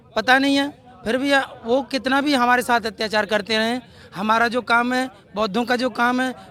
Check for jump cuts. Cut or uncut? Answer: uncut